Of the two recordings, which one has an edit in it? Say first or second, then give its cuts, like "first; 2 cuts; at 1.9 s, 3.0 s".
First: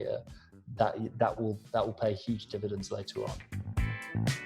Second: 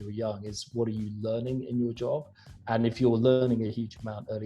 first; 1 cut; at 3.5 s